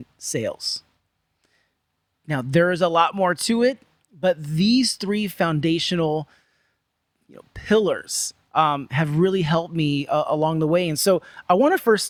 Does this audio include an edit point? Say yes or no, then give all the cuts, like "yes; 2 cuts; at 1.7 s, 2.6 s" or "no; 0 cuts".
no; 0 cuts